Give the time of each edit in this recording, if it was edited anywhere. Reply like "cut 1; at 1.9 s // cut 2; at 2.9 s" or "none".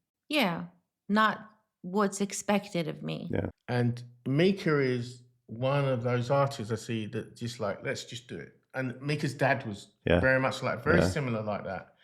cut 1; at 3.6 s